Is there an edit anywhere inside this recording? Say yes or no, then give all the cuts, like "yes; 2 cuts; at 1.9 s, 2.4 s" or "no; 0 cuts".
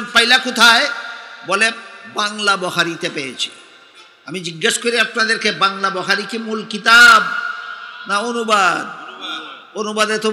no; 0 cuts